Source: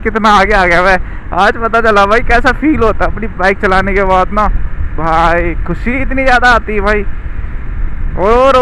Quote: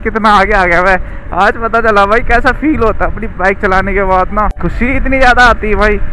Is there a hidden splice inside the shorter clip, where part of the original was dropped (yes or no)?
yes